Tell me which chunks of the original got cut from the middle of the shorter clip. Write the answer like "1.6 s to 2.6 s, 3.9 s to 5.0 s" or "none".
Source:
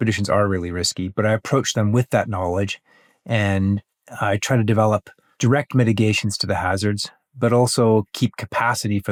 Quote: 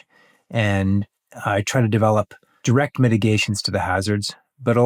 none